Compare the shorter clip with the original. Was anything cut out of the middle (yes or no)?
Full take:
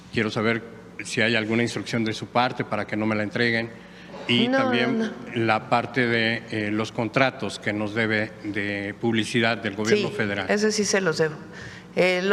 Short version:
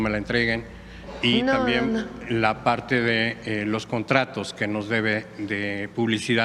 no